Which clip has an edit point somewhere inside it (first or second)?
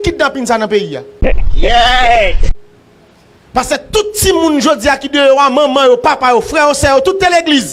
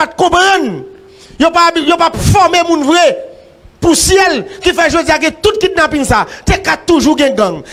first